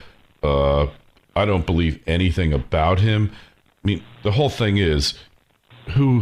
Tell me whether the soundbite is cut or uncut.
uncut